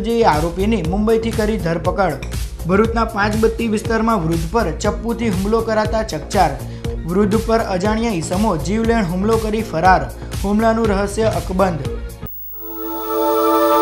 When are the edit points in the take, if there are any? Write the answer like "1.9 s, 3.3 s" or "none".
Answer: 12.3 s